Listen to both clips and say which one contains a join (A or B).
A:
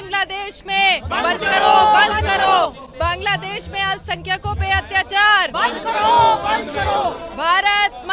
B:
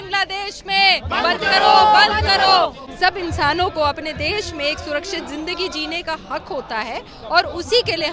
B